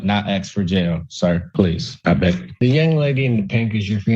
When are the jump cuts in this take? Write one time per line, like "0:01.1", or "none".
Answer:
0:01.5

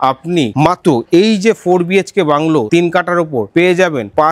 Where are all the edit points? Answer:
none

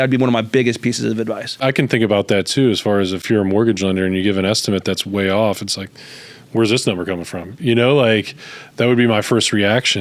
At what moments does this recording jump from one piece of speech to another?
0:01.6
0:03.2

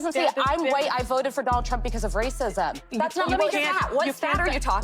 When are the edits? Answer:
0:02.8

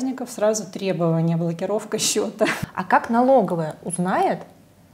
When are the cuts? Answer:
0:02.6

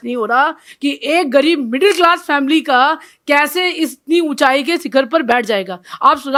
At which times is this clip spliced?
none

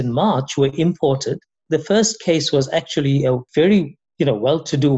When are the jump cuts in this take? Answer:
0:01.6
0:03.4

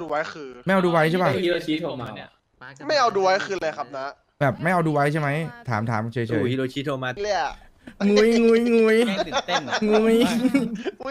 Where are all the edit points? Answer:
0:07.2

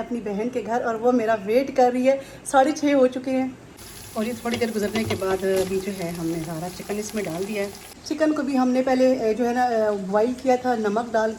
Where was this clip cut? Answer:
none

